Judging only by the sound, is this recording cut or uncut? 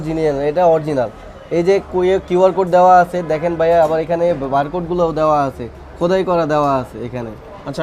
uncut